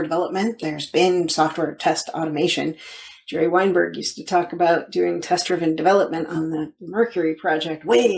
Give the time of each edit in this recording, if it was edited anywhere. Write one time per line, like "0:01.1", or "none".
none